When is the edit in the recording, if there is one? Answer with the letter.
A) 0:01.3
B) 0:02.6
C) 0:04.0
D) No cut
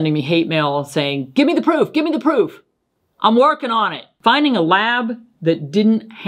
C